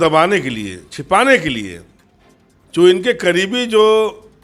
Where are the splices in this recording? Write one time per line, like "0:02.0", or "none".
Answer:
none